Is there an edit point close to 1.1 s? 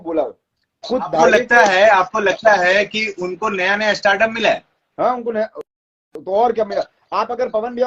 yes; 1 cut; at 1.1 s

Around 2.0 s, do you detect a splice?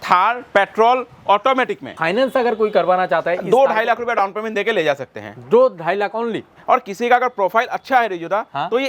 yes; 1 cut; at 2.0 s

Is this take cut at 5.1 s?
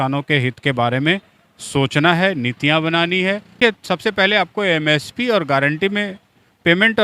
no; 1 cut; at 3.6 s

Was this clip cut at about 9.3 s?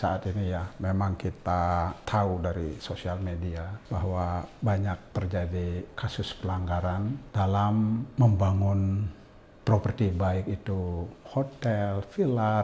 no; 4 cuts; at 2.0 s, 3.7 s, 5.0 s, 7.2 s

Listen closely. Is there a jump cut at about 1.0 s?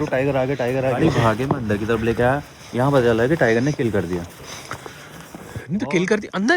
yes; 1 cut; at 1.0 s

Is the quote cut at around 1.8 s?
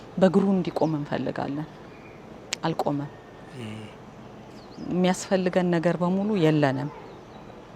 no; 0 cuts

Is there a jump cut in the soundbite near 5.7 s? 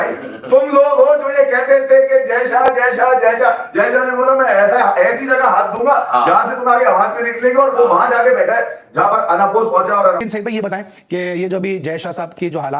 no; 1 cut; at 10.3 s

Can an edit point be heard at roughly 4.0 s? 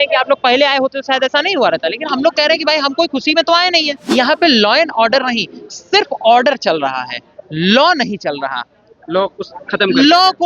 yes; 1 cut; at 4.0 s

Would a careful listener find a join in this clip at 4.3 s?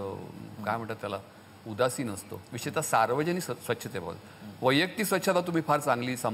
no; 0 cuts

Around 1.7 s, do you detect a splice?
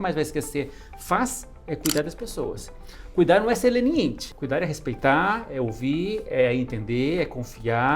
no; 1 cut; at 4.2 s

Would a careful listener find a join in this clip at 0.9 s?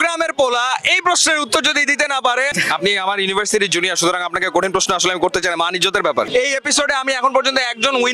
no; 2 cuts; at 2.6 s, 6.3 s

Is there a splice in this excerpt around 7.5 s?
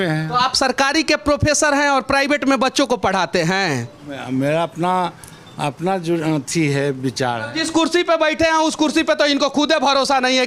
yes; 1 cut; at 7.5 s

